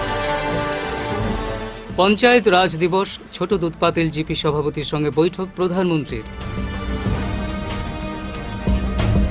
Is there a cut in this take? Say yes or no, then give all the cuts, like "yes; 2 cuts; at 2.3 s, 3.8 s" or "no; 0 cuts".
no; 0 cuts